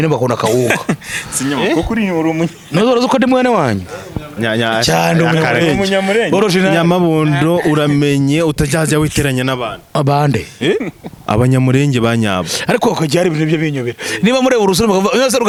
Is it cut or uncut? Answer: uncut